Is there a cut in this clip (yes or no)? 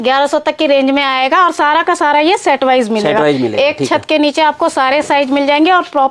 no